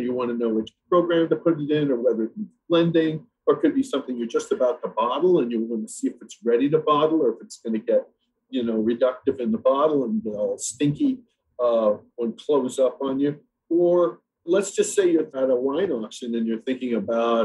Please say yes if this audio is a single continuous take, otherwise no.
yes